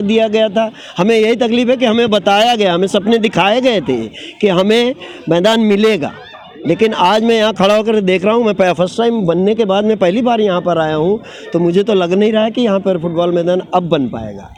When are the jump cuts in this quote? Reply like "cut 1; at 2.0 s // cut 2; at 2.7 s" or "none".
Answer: none